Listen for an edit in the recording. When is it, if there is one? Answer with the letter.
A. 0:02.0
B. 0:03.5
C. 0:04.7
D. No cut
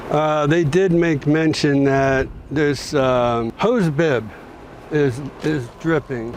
B